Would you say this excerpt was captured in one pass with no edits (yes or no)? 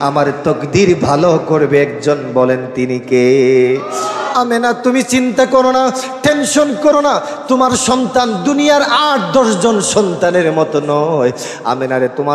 no